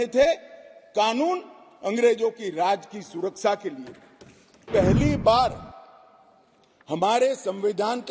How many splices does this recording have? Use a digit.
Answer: 1